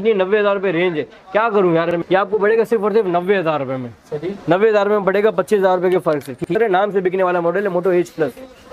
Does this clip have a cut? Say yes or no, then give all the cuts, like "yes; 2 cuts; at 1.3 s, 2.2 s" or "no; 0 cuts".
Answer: yes; 2 cuts; at 2.0 s, 6.5 s